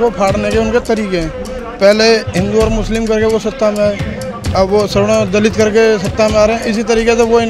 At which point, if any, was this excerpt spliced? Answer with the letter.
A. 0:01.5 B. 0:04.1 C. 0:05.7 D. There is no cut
D